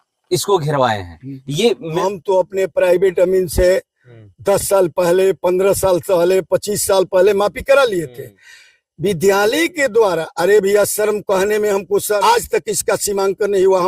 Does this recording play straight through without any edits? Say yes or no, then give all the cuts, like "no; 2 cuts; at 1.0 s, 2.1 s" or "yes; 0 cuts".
no; 2 cuts; at 2.0 s, 12.2 s